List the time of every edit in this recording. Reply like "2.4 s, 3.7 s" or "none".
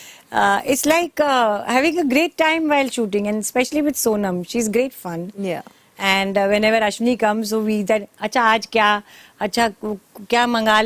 none

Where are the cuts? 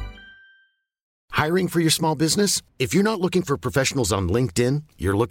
1.2 s

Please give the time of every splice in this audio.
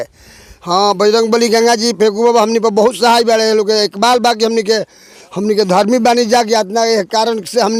none

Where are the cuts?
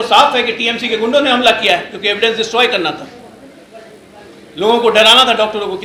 none

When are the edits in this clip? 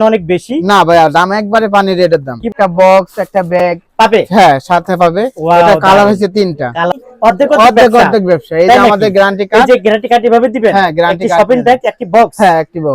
2.4 s, 6.9 s

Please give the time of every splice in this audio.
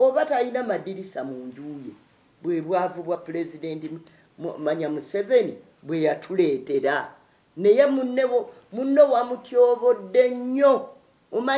none

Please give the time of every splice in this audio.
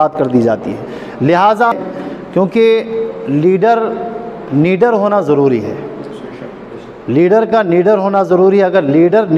1.7 s

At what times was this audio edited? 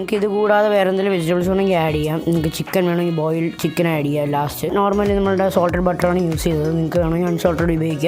4.7 s

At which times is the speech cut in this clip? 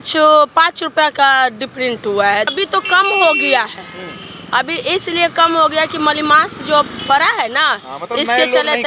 2.5 s

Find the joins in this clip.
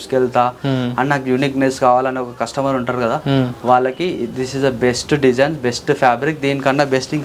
none

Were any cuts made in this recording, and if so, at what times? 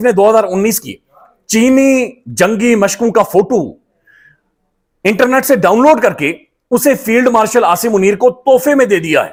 none

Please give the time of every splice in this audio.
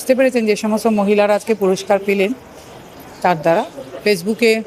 none

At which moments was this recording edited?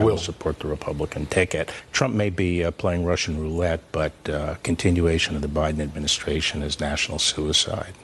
1.8 s

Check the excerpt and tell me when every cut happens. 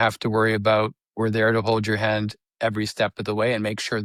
none

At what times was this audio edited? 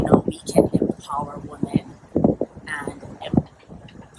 none

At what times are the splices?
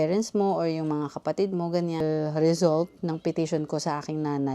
2.0 s

